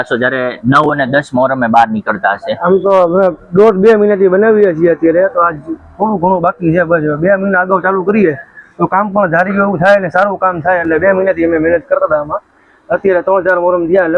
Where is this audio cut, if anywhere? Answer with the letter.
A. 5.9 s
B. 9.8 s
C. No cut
C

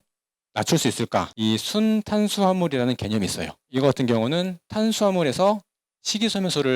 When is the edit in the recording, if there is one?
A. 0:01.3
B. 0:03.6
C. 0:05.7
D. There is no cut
A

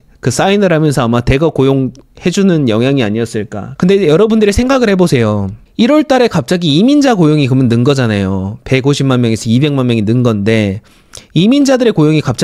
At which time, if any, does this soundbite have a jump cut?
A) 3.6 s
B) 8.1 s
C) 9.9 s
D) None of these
A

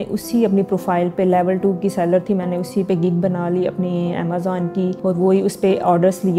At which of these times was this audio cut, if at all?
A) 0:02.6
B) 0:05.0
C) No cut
B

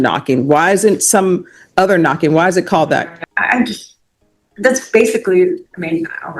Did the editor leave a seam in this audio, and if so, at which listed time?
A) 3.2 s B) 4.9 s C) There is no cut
A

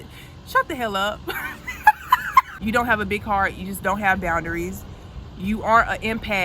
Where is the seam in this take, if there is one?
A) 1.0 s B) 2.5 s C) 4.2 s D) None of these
B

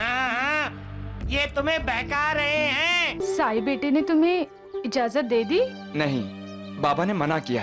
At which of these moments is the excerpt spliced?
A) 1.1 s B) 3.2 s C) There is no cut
B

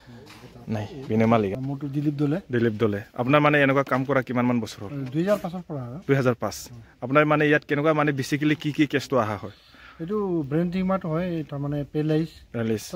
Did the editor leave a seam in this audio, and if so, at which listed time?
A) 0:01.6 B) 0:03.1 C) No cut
A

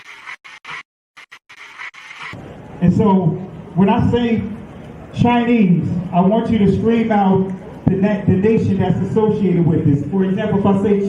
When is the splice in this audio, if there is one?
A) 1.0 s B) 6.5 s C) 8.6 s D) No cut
A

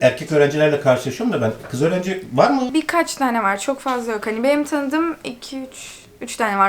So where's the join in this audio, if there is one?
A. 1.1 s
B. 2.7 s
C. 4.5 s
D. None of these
B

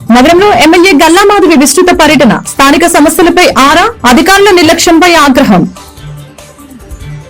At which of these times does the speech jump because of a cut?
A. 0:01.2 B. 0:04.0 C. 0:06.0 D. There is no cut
C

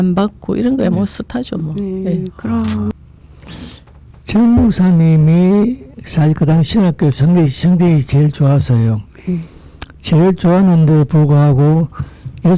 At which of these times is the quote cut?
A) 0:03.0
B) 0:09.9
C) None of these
A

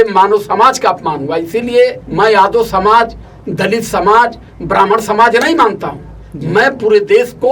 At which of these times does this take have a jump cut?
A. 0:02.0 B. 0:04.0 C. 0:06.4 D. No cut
A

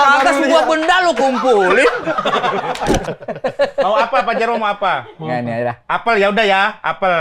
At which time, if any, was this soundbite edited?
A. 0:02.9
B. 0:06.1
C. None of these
A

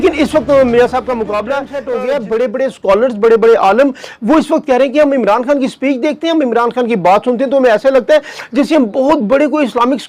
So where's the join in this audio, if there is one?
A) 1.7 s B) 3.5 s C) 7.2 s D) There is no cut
A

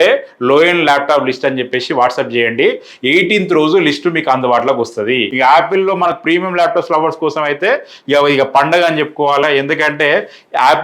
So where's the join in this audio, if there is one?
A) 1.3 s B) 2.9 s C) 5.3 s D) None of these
C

